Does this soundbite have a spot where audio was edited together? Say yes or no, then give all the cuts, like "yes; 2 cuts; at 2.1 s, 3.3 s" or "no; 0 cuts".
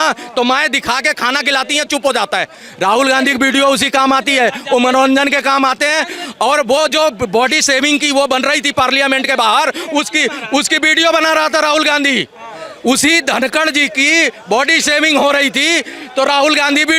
no; 0 cuts